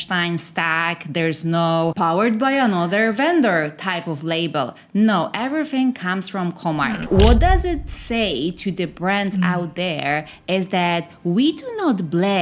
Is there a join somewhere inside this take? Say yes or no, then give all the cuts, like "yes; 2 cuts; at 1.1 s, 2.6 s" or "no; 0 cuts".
yes; 2 cuts; at 1.9 s, 7.0 s